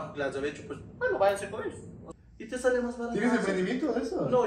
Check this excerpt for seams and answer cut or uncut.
cut